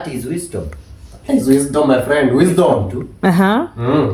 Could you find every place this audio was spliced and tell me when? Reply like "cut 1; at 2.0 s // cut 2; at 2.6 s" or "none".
none